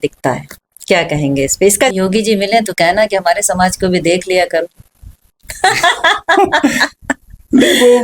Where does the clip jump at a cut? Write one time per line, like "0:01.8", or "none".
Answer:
0:01.9